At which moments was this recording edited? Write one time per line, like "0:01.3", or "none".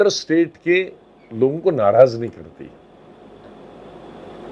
none